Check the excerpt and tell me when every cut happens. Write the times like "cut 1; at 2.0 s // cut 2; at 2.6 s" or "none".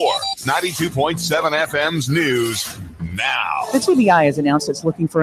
cut 1; at 1.2 s